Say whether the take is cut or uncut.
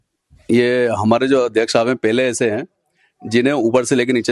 uncut